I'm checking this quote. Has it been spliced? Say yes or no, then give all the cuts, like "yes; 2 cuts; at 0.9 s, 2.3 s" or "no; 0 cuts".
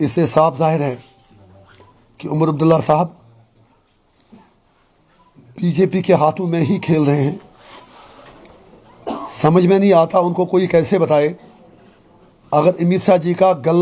no; 0 cuts